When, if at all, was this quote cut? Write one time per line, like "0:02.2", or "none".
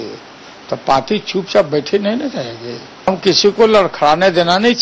0:03.1